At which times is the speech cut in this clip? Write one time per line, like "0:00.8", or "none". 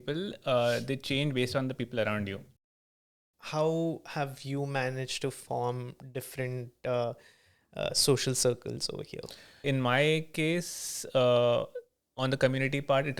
0:02.6
0:09.6